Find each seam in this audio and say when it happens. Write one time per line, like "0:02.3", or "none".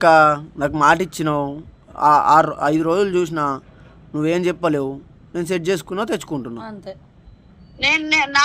none